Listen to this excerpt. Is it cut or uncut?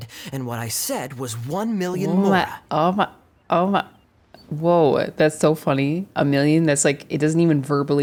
uncut